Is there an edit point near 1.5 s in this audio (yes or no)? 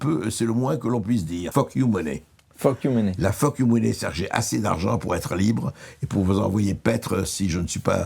yes